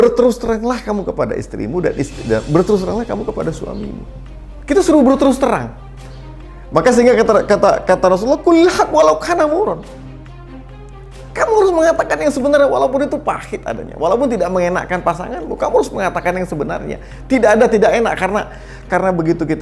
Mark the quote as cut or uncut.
uncut